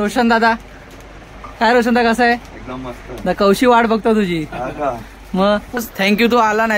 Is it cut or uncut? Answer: cut